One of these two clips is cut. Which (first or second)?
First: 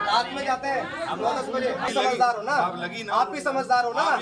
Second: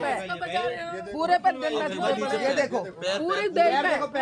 first